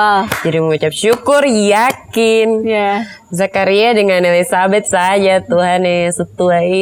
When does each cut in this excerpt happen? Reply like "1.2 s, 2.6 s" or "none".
none